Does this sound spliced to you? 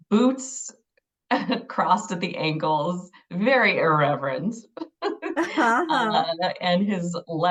no; 0 cuts

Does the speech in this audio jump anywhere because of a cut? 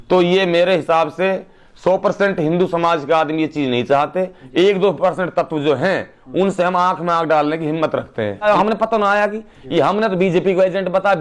yes; 1 cut; at 8.4 s

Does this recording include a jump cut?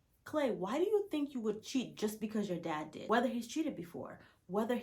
yes; 1 cut; at 3.1 s

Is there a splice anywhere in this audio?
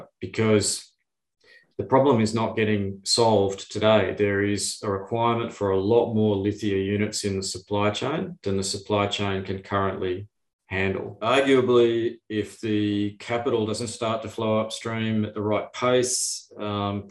yes; 1 cut; at 11.1 s

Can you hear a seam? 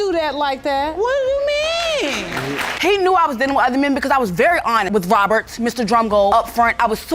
yes; 1 cut; at 2.8 s

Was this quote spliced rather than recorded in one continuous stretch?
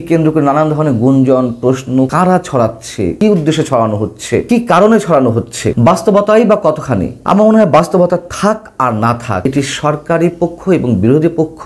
yes; 6 cuts; at 2.1 s, 3.2 s, 4.4 s, 5.6 s, 7.1 s, 9.4 s

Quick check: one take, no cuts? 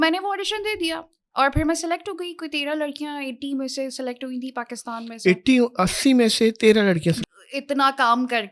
no; 1 cut; at 7.2 s

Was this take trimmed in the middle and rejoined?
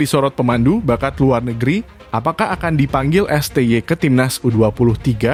no; 0 cuts

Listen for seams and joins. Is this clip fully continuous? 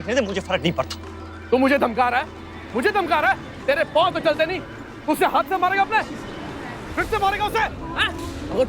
no; 1 cut; at 1.3 s

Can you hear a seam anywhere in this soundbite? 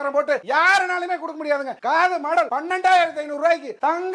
no; 0 cuts

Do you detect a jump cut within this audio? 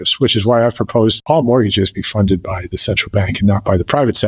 yes; 1 cut; at 1.2 s

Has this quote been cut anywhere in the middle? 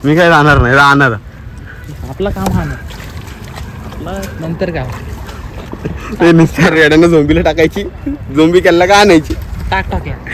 no; 0 cuts

